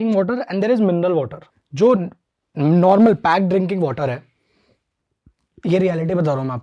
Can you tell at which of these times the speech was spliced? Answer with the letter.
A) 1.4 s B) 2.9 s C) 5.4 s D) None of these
A